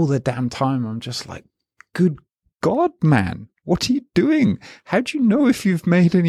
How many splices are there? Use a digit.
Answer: 0